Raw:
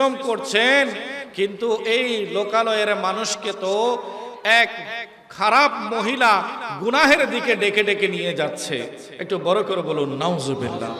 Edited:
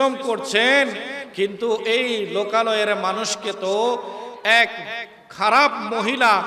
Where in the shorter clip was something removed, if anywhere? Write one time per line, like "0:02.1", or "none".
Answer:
none